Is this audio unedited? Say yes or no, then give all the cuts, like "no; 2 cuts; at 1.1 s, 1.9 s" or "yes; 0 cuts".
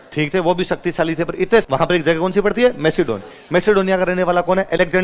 no; 1 cut; at 1.7 s